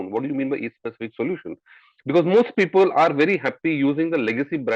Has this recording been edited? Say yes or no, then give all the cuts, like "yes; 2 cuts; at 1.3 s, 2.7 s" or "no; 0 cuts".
no; 0 cuts